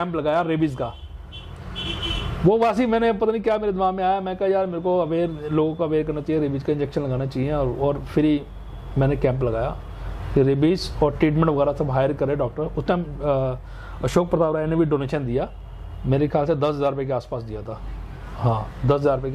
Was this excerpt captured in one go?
yes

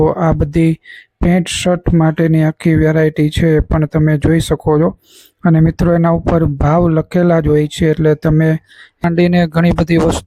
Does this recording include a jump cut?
yes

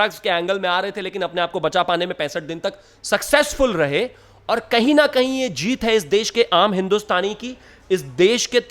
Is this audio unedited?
yes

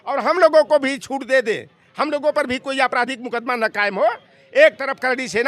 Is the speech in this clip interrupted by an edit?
no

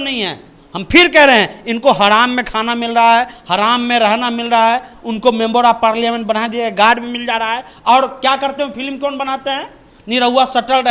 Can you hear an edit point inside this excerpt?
no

